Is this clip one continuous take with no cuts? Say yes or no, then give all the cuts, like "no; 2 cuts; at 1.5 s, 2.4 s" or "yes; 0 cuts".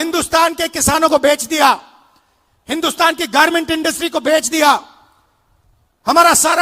yes; 0 cuts